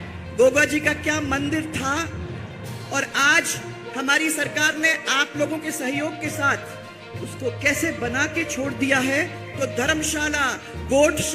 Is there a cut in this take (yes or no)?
yes